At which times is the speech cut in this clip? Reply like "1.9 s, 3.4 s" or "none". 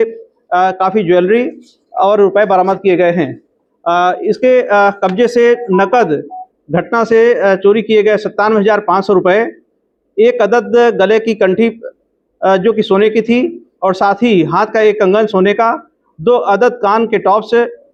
none